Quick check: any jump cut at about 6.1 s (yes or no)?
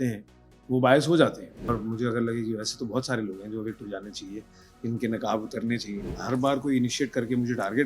yes